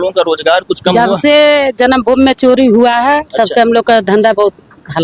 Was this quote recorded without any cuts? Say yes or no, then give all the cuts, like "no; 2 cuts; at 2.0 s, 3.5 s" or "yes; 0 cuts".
yes; 0 cuts